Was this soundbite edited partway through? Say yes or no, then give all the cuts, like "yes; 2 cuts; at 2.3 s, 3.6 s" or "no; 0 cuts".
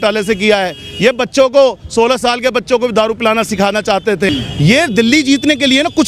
yes; 1 cut; at 4.3 s